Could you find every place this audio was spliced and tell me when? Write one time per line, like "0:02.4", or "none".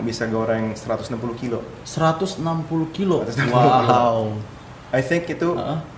none